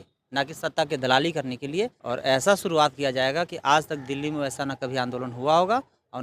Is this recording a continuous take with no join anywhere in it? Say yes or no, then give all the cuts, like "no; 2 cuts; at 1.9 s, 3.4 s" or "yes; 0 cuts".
no; 1 cut; at 2.0 s